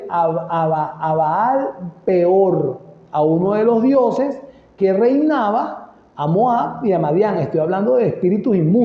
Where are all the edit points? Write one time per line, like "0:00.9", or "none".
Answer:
0:04.7